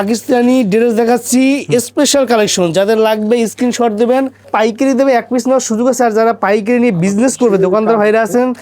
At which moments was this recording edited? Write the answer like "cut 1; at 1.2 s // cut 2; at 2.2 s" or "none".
cut 1; at 4.5 s